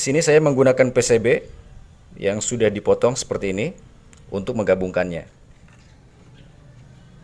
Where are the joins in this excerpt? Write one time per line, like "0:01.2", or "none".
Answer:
0:05.5